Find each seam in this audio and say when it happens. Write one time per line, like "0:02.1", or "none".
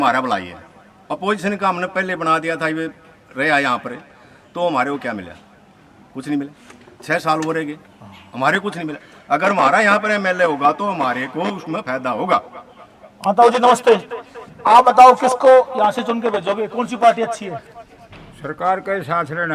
none